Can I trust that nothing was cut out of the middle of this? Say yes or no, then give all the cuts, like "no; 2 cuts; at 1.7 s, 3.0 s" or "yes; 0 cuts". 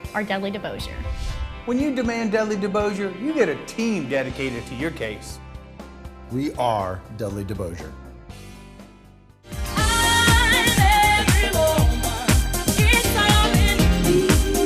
no; 1 cut; at 9.3 s